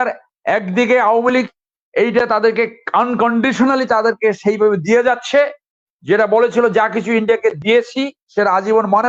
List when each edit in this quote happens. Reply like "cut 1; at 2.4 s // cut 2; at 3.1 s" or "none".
none